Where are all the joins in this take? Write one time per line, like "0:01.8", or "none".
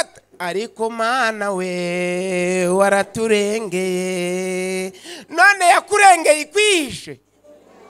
none